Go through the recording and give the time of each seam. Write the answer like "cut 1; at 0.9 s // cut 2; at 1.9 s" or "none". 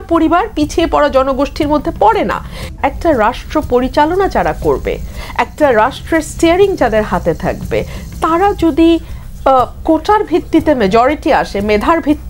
cut 1; at 2.7 s